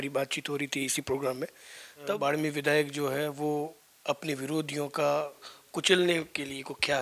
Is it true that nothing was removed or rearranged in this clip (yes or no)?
no